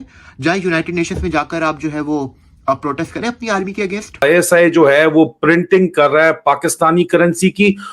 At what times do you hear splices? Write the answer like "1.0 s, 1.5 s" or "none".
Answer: 4.2 s